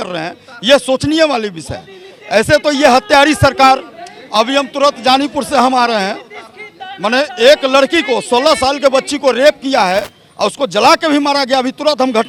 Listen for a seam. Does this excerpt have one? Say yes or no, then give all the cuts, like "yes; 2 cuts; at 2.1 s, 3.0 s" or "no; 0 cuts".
no; 0 cuts